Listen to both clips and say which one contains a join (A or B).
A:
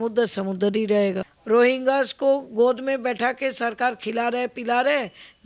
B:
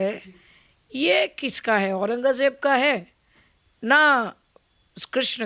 A